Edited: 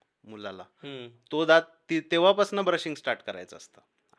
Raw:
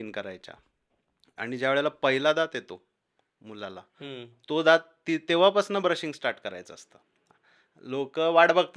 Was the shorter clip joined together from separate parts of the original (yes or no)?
no